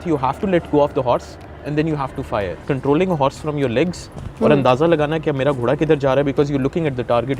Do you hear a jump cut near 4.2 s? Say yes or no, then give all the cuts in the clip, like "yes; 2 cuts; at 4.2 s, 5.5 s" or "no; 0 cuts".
no; 1 cut; at 2.6 s